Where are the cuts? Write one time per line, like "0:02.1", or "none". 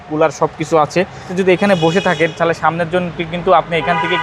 0:01.3